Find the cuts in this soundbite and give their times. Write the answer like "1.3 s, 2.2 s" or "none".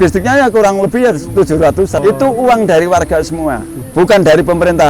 2.0 s, 3.7 s